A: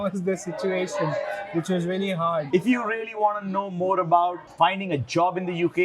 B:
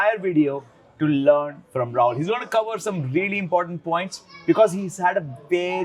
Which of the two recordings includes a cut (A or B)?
A